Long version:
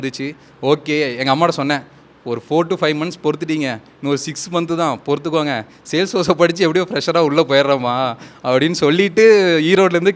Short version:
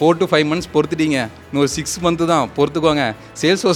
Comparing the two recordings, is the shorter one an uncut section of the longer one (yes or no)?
yes